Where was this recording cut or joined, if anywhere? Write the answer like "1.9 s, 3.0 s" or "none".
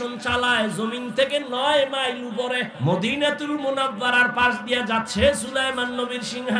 2.7 s